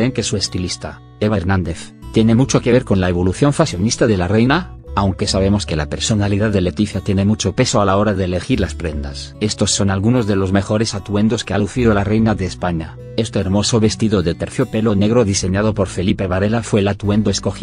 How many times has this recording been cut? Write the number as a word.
one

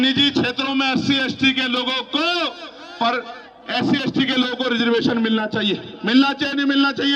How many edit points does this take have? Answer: zero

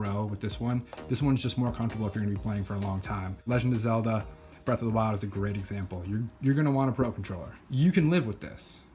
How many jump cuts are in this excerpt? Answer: one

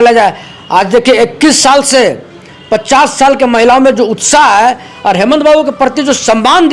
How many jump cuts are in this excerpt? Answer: zero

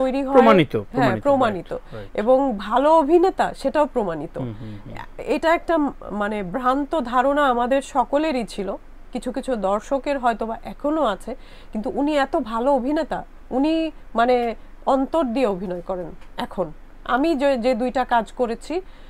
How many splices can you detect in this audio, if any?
zero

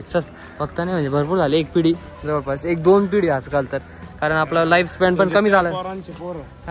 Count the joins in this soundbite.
zero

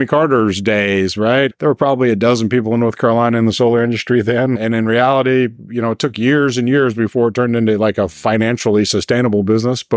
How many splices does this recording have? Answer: two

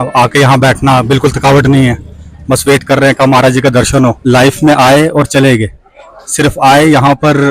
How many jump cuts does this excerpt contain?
one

